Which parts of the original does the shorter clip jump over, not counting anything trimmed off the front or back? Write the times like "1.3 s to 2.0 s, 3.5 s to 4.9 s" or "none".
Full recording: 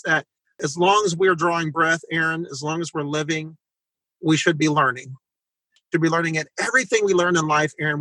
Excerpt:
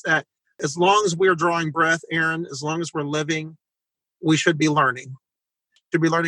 none